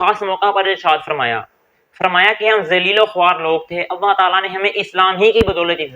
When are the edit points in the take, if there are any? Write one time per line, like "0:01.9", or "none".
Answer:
none